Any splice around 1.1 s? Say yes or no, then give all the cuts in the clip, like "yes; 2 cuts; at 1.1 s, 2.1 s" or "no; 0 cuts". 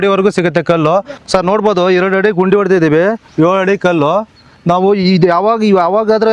no; 0 cuts